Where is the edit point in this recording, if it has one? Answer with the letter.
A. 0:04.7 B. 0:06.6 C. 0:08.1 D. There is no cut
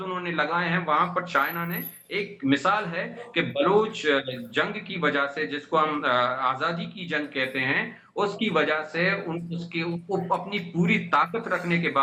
D